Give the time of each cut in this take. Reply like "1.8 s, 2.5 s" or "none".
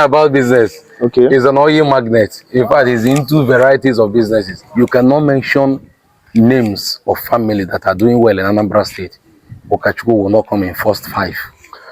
4.6 s